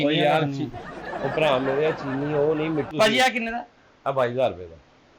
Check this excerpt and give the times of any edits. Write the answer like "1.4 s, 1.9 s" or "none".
2.9 s